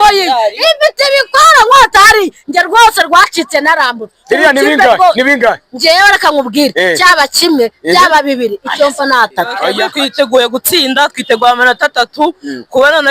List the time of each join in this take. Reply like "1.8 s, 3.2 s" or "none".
9.8 s